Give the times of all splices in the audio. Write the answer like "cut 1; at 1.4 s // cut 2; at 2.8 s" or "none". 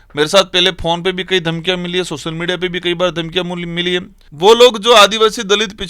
cut 1; at 4.2 s